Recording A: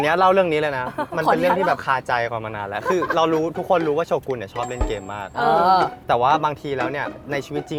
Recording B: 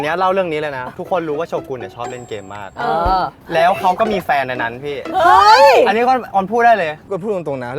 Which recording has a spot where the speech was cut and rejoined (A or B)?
B